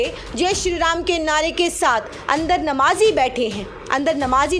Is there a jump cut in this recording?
no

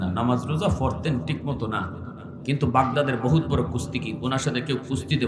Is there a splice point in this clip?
yes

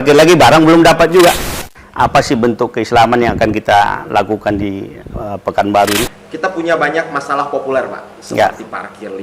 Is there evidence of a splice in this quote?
yes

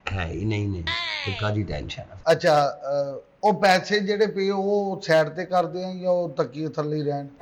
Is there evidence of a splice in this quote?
yes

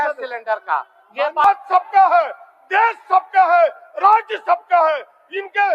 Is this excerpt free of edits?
no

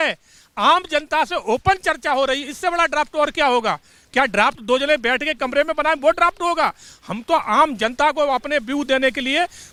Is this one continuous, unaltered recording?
yes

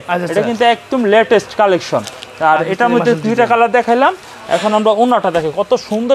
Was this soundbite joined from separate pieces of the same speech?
no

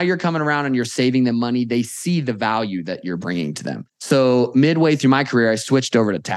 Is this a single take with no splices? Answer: no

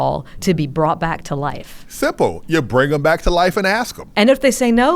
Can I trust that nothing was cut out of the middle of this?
no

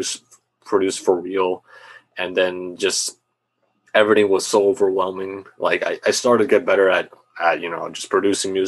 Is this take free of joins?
yes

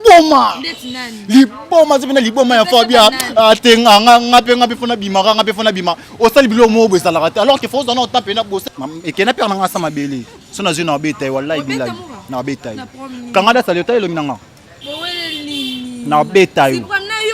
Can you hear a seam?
yes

